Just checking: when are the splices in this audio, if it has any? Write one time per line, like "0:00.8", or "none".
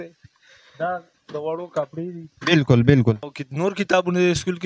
0:03.4